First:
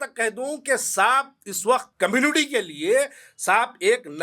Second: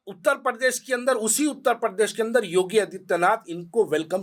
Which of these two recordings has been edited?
first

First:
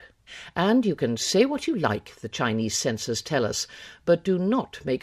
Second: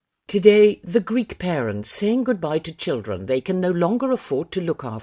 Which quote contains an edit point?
first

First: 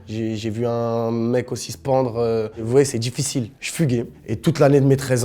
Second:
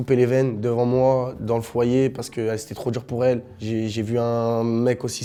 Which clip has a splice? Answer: first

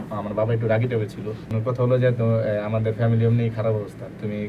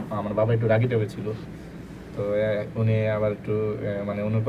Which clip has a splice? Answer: first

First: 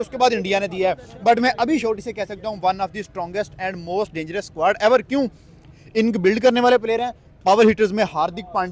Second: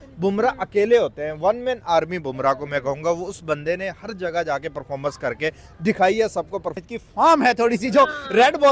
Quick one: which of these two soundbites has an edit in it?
second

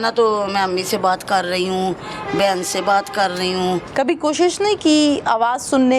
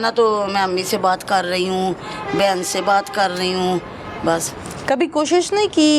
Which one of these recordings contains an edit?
first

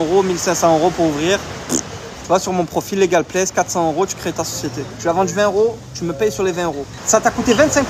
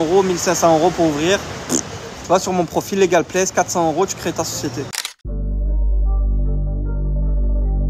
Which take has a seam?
first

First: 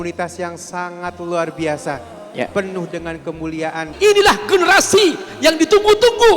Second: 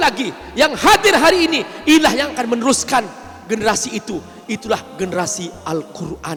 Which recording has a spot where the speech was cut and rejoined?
first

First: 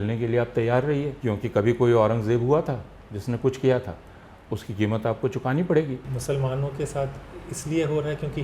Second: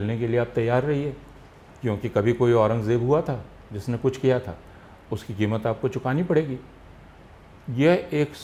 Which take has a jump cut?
first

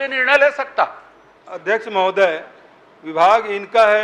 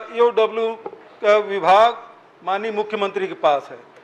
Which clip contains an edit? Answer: first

